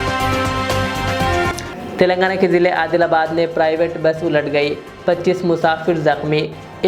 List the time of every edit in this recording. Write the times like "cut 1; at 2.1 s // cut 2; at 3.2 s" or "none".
cut 1; at 1.6 s